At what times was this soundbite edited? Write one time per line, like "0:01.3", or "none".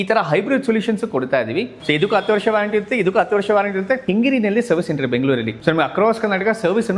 0:01.8
0:04.0
0:05.5